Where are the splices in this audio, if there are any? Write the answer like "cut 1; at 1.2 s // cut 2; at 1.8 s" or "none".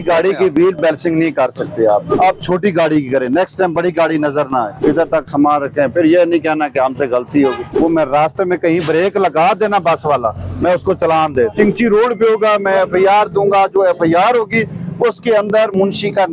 cut 1; at 2.1 s // cut 2; at 4.7 s // cut 3; at 7.7 s // cut 4; at 11.5 s